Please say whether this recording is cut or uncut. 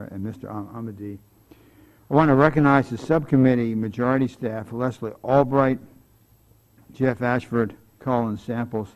uncut